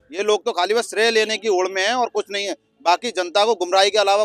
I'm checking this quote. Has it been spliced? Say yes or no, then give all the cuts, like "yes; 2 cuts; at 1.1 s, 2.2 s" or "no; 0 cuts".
no; 0 cuts